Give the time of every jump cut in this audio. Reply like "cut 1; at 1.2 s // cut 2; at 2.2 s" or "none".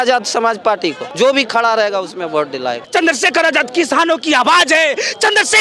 cut 1; at 1.0 s // cut 2; at 2.8 s